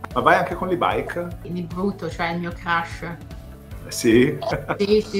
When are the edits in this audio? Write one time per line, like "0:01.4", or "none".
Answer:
0:01.5